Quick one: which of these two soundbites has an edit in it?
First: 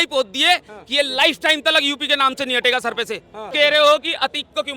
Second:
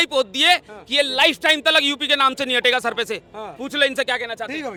first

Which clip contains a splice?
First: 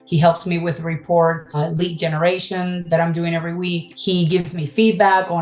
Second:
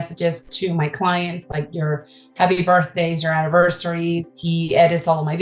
first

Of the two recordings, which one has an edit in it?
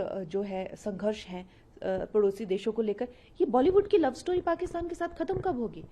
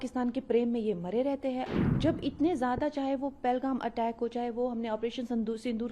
second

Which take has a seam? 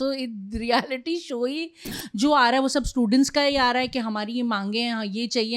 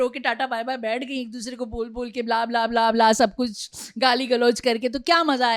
first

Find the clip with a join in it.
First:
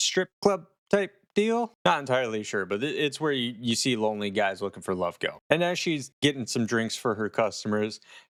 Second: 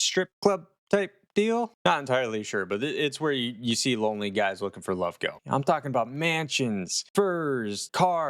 second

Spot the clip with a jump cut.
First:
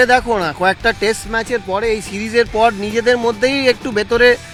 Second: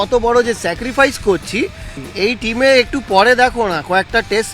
second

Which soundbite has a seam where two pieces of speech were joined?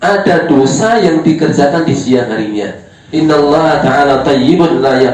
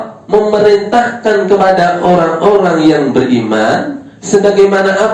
first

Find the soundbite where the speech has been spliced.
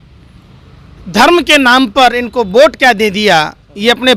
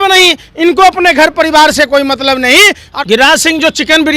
second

